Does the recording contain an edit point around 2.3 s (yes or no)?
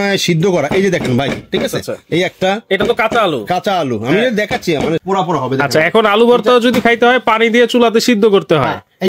no